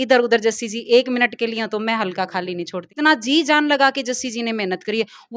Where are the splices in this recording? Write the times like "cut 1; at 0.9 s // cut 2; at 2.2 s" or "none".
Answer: cut 1; at 2.9 s